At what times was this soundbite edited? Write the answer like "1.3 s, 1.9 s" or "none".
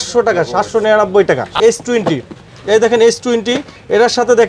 1.5 s